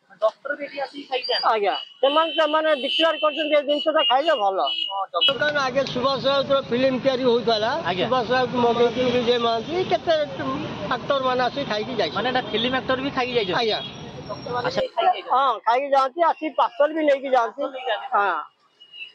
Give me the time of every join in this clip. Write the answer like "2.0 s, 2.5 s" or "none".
none